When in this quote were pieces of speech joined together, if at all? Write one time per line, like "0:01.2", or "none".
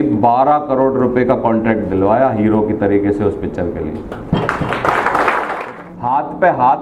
0:05.7